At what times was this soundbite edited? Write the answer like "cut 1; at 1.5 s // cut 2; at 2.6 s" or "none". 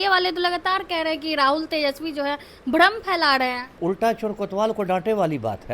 cut 1; at 3.8 s